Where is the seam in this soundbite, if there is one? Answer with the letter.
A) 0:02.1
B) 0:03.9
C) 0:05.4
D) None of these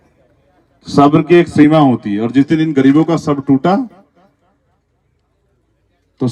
D